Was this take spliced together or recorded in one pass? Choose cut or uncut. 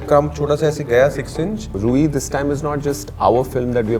cut